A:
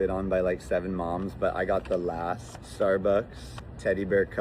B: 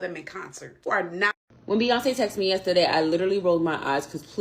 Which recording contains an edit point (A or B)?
B